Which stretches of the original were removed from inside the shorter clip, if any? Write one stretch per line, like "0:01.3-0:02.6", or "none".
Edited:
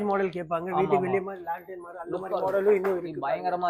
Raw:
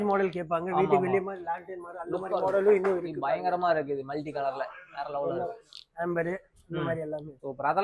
none